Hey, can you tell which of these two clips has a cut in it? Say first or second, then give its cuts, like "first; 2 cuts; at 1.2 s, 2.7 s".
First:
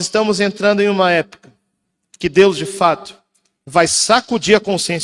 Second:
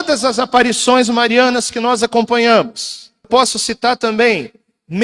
second; 1 cut; at 3.3 s